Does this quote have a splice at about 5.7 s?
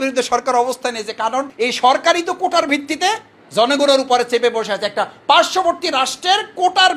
no; 1 cut; at 1.5 s

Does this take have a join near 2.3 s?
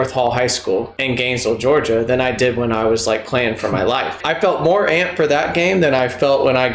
no; 2 cuts; at 0.9 s, 4.2 s

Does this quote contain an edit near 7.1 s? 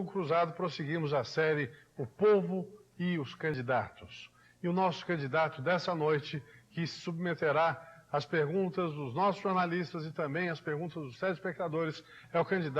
no; 1 cut; at 8.4 s

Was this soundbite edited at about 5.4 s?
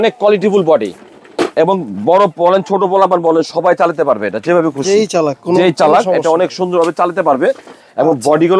no; 0 cuts

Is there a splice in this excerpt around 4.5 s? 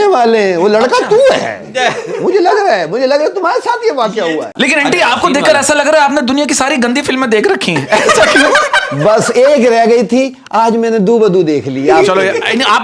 yes; 1 cut; at 4.5 s

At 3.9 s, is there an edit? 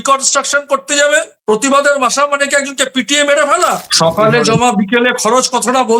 yes; 1 cut; at 3.9 s

